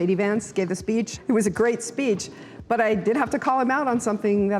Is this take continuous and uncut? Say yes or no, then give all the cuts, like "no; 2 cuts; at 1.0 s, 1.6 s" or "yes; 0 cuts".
no; 1 cut; at 1.1 s